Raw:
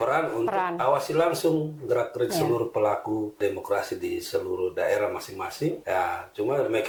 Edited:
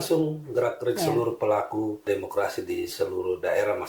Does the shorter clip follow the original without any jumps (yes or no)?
yes